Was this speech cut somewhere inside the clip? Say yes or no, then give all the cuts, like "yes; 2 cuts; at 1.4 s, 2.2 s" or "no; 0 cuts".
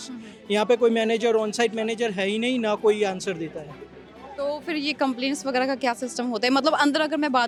no; 0 cuts